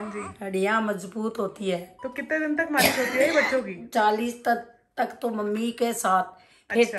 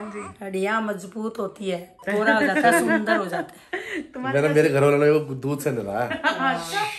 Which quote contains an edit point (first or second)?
second